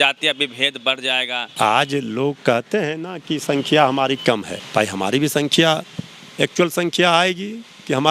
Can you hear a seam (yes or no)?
yes